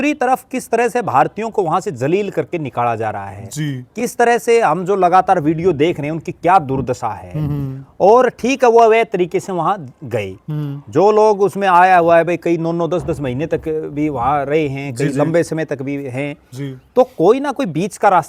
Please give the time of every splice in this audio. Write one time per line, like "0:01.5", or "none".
none